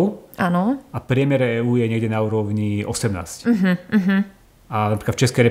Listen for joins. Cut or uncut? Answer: uncut